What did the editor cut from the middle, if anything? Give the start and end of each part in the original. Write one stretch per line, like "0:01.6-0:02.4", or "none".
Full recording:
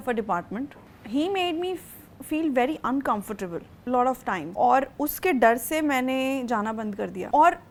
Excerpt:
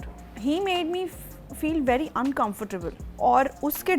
0:03.8-0:04.4